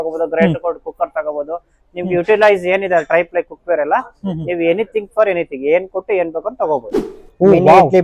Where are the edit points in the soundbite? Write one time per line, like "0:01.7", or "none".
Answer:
0:07.0